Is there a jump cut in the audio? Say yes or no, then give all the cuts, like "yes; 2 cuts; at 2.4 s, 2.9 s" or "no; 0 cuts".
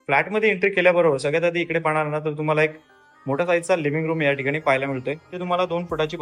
yes; 1 cut; at 5.2 s